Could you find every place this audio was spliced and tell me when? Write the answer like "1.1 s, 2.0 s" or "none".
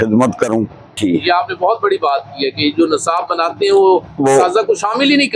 0.9 s